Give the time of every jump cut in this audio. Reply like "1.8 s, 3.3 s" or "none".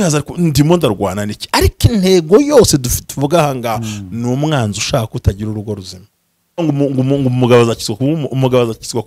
6.6 s